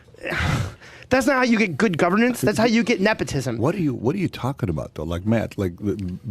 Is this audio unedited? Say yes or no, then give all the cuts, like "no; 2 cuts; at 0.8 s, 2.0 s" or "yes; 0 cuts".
no; 1 cut; at 4.4 s